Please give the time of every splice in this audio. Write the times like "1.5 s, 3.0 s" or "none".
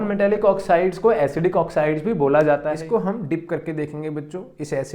2.7 s